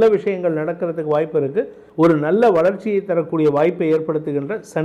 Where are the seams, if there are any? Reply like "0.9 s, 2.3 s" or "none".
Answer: 1.8 s